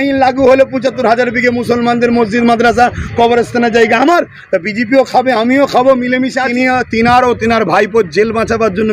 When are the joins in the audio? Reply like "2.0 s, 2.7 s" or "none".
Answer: 6.4 s